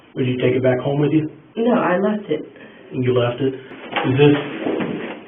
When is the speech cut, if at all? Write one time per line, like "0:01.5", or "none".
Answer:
0:03.7